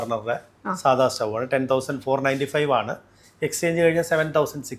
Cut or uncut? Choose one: uncut